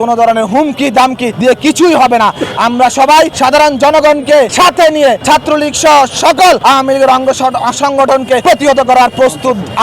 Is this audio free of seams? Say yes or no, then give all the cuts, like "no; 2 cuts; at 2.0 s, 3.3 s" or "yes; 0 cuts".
no; 6 cuts; at 1.3 s, 3.3 s, 4.5 s, 5.2 s, 6.6 s, 8.4 s